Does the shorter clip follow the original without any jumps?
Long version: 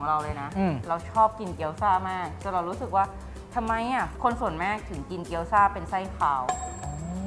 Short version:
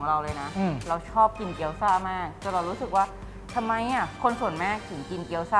yes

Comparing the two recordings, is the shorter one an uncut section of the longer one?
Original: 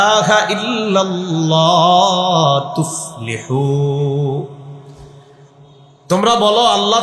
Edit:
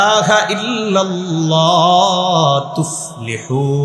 yes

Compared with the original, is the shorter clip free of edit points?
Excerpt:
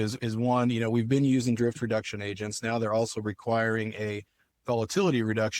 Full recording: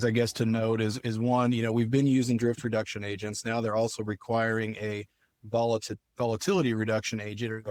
no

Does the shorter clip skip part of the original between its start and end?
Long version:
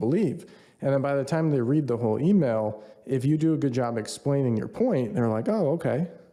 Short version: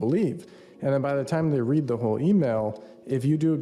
no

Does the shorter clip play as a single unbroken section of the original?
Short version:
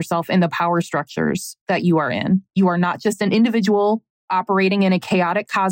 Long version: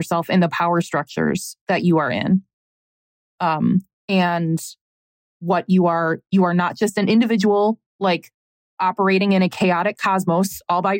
no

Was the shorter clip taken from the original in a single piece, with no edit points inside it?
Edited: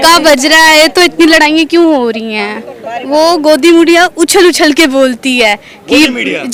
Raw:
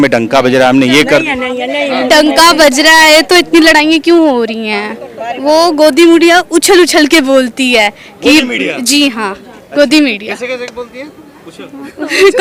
yes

